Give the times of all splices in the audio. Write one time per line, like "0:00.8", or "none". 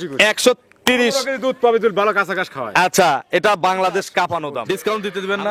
0:04.6